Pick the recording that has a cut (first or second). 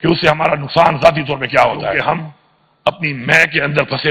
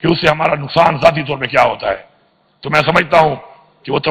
first